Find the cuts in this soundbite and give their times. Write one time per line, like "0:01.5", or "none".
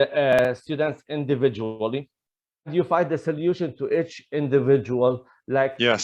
0:02.7